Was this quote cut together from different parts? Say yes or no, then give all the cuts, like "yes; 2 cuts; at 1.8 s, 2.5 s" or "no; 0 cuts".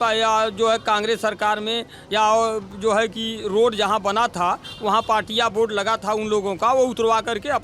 no; 0 cuts